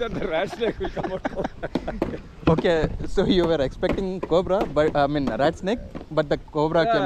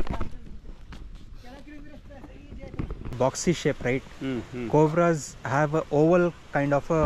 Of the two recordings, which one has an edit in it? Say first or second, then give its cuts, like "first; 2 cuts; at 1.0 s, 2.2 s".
second; 1 cut; at 3.1 s